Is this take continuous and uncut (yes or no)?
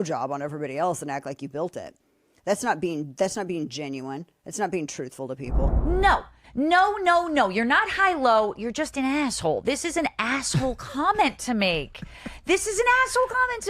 no